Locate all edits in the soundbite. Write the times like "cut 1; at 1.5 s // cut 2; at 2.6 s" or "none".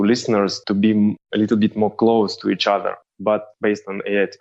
cut 1; at 3.5 s